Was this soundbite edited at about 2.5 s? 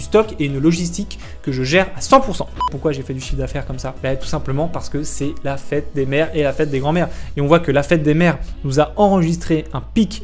yes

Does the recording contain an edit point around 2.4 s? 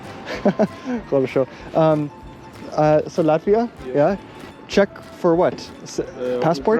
no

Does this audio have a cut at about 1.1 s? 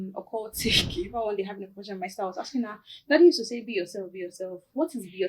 yes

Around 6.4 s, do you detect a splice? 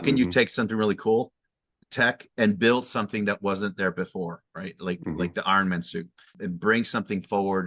yes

